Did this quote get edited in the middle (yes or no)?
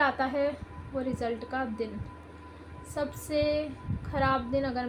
no